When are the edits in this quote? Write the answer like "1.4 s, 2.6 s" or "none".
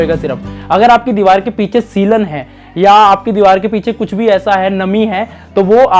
none